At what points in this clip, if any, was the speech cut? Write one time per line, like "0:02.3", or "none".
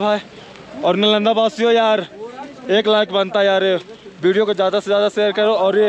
none